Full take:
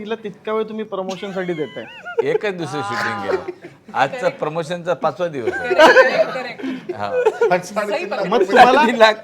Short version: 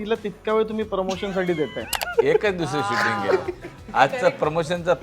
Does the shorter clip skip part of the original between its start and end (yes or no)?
no